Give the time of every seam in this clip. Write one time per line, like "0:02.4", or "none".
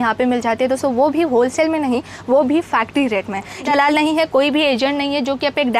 0:03.7